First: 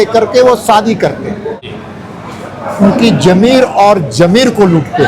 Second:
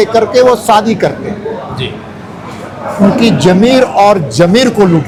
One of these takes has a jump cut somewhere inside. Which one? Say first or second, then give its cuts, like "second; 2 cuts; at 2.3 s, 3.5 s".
first; 1 cut; at 1.7 s